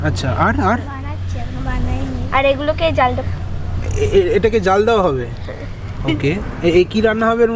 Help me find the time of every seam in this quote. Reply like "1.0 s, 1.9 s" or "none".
none